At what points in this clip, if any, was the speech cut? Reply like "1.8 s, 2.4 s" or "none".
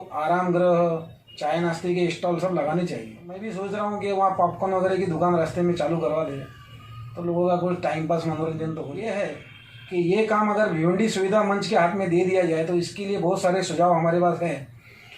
3.5 s, 8.9 s